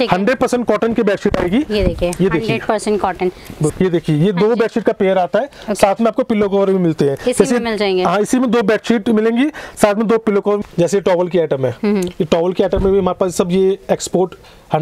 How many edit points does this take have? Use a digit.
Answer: 2